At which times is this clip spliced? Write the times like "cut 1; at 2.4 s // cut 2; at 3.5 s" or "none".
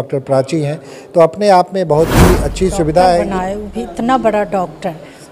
cut 1; at 3.3 s